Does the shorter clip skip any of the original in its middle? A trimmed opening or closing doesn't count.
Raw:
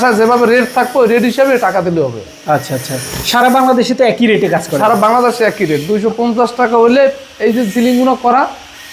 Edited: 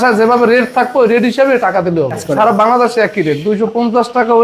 yes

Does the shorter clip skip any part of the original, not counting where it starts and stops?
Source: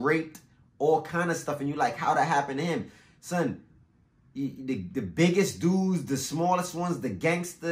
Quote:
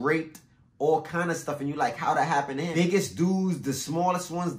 yes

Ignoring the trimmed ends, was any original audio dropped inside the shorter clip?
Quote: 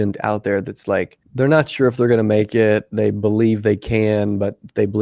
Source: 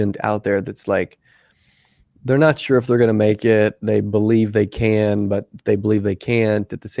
yes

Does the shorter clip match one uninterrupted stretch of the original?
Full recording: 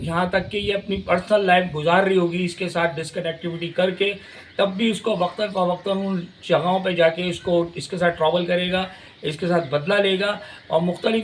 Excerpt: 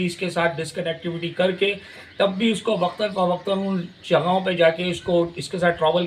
yes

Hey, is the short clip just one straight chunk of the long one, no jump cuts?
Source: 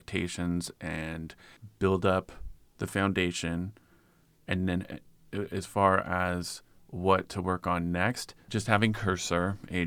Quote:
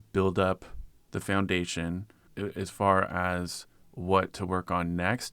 no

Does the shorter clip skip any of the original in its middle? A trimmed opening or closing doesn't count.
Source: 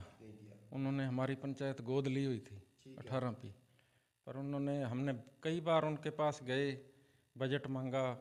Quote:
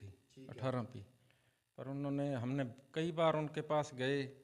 no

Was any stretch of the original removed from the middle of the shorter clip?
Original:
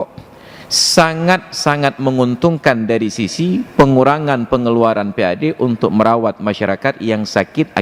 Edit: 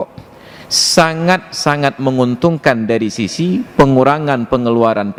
no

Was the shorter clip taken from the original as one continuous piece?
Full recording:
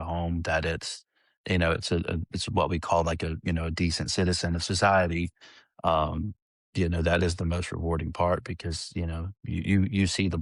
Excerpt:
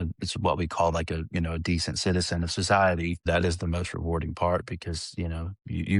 no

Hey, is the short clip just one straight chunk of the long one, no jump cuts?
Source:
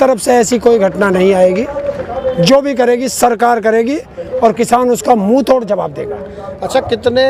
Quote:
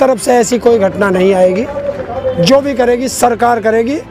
yes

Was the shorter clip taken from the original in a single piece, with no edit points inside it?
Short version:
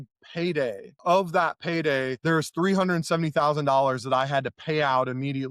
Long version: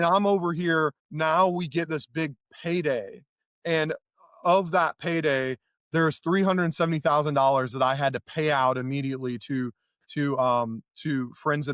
no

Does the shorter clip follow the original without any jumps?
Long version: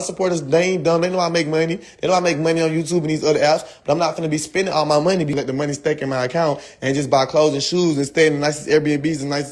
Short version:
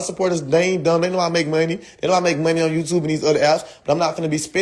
yes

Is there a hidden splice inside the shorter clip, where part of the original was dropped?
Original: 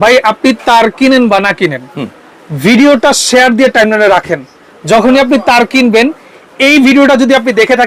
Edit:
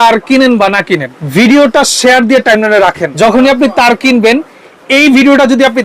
yes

